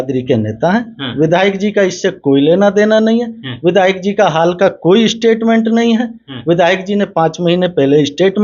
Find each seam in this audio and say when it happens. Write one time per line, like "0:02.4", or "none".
none